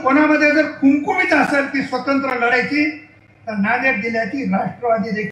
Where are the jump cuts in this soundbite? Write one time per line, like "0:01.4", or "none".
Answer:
none